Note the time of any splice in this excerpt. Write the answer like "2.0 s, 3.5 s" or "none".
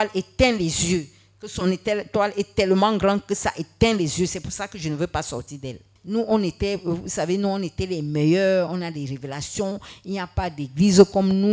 5.9 s